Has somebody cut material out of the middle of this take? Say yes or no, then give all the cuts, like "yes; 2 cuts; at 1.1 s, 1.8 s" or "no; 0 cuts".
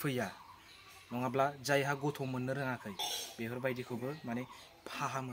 no; 0 cuts